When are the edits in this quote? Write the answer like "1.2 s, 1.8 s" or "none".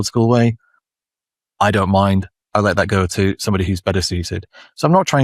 none